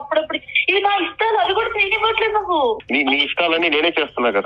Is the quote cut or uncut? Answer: cut